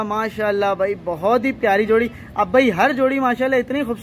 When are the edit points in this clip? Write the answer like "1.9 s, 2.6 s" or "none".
none